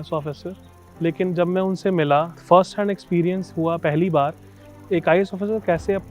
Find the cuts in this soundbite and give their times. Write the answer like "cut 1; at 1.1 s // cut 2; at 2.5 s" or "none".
cut 1; at 2.3 s // cut 2; at 4.7 s